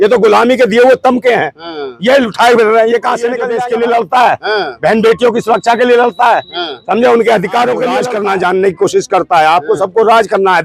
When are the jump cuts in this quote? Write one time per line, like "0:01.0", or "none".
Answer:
0:03.5
0:08.0